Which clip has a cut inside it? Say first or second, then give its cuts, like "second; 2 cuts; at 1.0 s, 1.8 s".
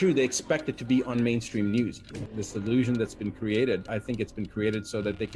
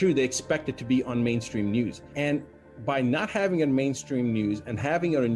first; 1 cut; at 2.0 s